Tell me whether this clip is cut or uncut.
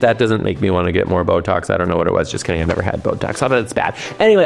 uncut